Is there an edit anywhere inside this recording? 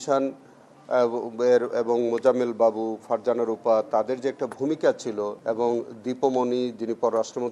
yes; 1 cut; at 5.4 s

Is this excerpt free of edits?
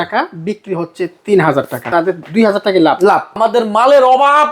no; 2 cuts; at 1.8 s, 3.4 s

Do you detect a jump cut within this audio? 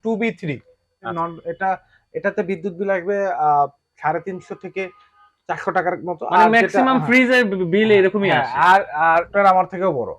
yes; 2 cuts; at 1.1 s, 9.3 s

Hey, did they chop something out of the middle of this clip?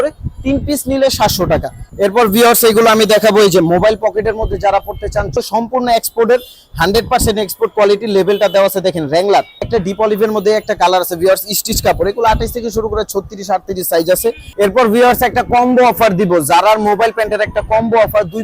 yes; 4 cuts; at 1.8 s, 5.3 s, 9.7 s, 14.4 s

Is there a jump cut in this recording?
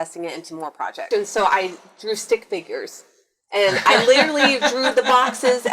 yes; 1 cut; at 1.1 s

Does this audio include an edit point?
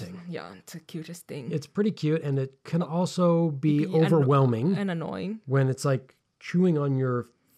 no; 0 cuts

